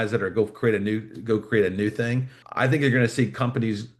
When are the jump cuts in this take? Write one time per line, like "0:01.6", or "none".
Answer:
0:02.4